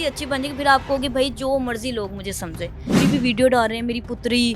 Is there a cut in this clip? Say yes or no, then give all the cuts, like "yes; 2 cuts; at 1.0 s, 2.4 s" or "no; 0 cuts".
yes; 1 cut; at 2.9 s